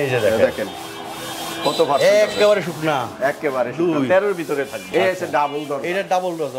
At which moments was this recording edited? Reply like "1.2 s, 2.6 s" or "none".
4.8 s